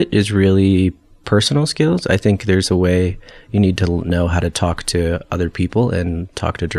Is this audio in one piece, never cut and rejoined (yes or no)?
yes